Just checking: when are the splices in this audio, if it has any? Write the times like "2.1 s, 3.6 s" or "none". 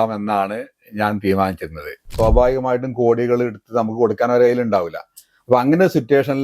2.1 s